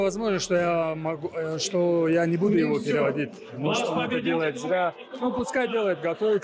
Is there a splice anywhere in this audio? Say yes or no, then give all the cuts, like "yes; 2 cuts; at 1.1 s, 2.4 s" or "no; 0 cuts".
no; 0 cuts